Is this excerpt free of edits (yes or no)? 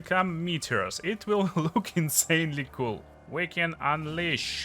no